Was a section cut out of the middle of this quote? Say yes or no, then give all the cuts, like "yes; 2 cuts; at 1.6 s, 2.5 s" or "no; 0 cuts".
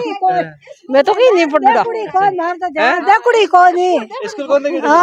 no; 0 cuts